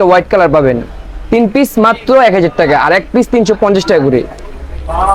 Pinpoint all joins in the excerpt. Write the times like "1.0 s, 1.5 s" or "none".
none